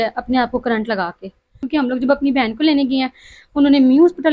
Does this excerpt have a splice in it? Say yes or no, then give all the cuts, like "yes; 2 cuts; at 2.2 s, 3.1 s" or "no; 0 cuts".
yes; 1 cut; at 1.6 s